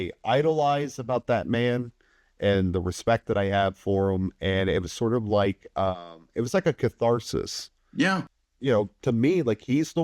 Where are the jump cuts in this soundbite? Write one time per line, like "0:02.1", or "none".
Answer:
0:08.2